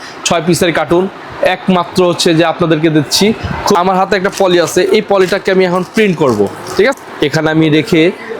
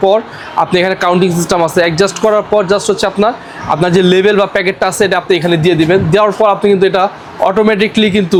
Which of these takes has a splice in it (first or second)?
first